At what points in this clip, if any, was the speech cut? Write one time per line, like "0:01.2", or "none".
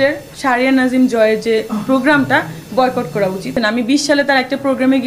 0:03.5